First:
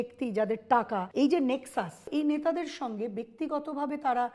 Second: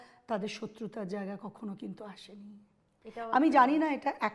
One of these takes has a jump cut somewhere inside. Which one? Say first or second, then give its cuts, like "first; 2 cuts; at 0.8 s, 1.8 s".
first; 2 cuts; at 1.1 s, 2.1 s